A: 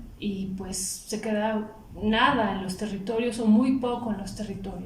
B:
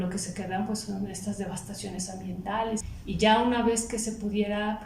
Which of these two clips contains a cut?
B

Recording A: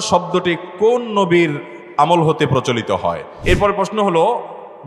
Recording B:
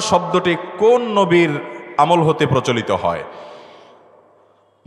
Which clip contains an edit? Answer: A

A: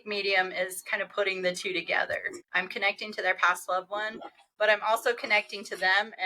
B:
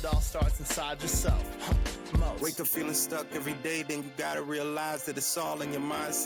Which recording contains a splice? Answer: A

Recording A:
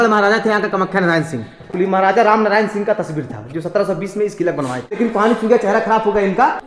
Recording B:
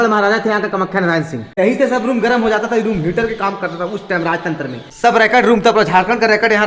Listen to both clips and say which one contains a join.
B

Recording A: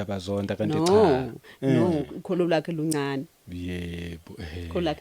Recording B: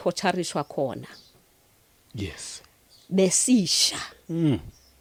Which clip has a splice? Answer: A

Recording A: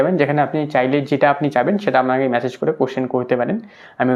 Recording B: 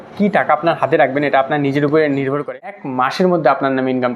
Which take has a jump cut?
B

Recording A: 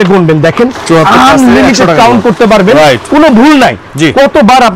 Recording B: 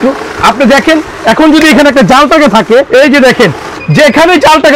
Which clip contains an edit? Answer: B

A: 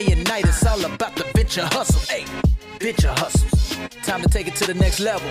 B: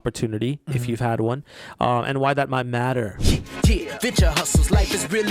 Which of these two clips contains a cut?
B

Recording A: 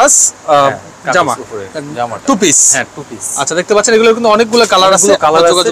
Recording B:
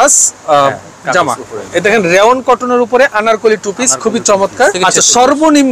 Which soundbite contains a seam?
B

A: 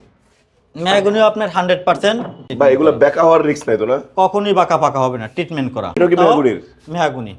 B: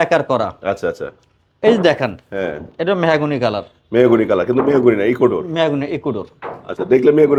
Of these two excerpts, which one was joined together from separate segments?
A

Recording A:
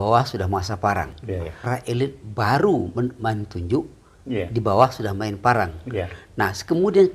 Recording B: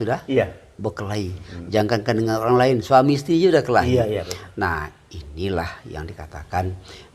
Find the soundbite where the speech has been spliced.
A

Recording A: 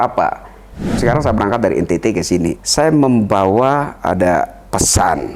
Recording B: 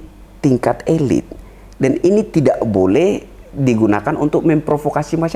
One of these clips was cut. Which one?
A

